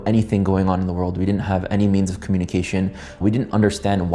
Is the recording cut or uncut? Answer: uncut